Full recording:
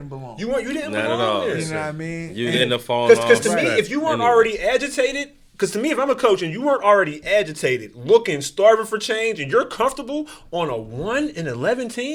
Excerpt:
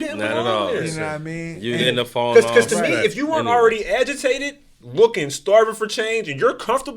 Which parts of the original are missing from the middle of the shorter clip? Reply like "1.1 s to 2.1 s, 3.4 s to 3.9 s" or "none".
5.5 s to 7.9 s